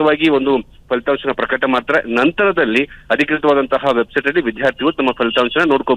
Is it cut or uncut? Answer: uncut